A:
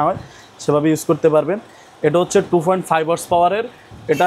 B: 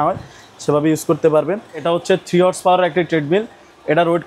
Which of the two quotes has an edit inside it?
B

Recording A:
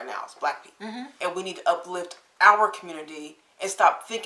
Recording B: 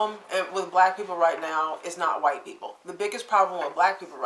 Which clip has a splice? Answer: A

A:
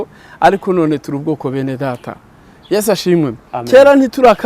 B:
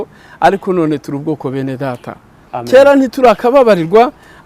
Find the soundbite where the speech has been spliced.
B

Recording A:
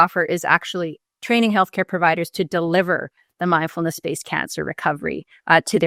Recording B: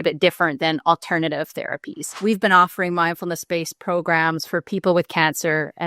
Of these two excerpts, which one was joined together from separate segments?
B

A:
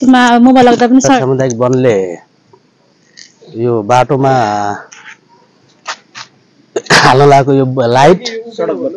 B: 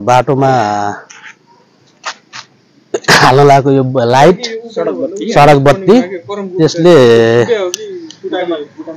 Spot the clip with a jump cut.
A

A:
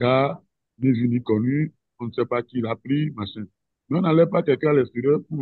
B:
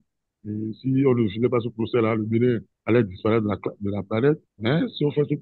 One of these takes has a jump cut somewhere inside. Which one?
B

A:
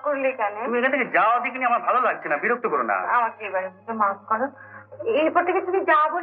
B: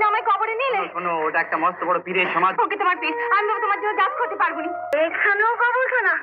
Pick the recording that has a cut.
B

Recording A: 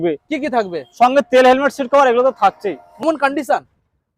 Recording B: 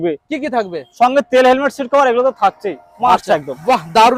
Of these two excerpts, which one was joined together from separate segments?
A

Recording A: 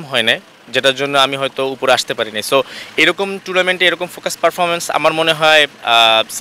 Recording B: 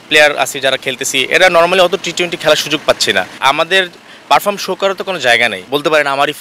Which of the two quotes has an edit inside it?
B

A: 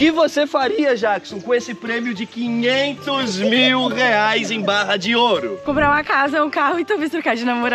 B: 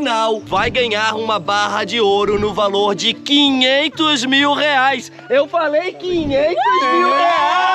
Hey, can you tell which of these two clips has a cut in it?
A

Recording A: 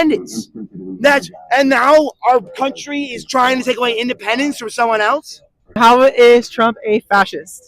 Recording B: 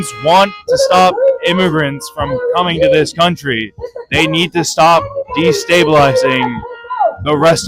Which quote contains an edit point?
A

